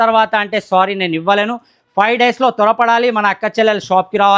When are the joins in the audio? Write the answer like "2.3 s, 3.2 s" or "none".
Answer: none